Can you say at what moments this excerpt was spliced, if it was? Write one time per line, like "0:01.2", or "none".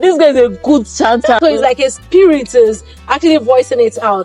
0:01.4